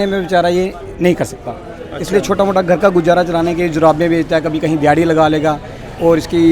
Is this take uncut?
yes; 0 cuts

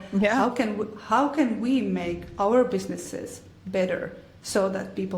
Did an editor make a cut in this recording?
no; 0 cuts

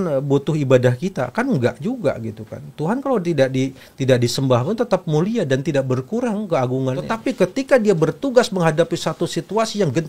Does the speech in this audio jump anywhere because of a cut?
yes; 1 cut; at 7.1 s

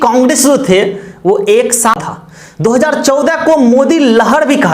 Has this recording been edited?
yes; 1 cut; at 2.0 s

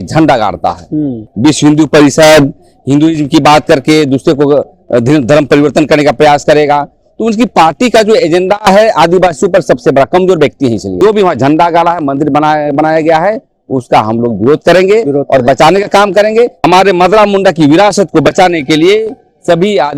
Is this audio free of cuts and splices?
no; 3 cuts; at 1.2 s, 11.0 s, 16.5 s

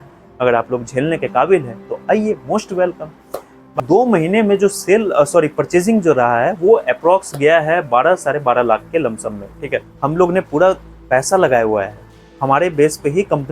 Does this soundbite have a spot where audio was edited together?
yes; 2 cuts; at 3.7 s, 9.9 s

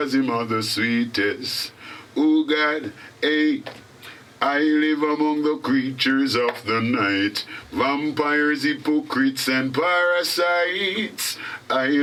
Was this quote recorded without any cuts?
yes; 0 cuts

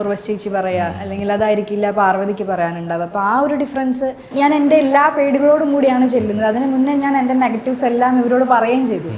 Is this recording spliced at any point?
yes; 1 cut; at 4.2 s

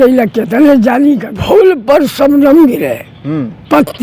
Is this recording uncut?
no; 1 cut; at 1.3 s

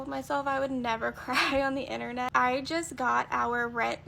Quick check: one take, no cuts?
no; 1 cut; at 2.3 s

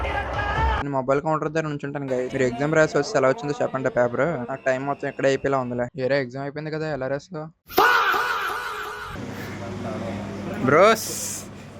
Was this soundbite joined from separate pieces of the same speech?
no; 0 cuts

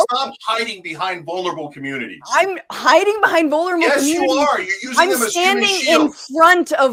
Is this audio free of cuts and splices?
yes; 0 cuts

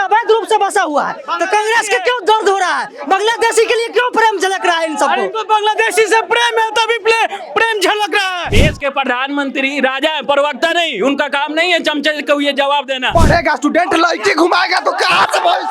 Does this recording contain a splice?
yes; 2 cuts; at 8.4 s, 13.1 s

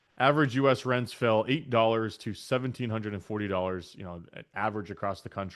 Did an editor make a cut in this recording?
no; 0 cuts

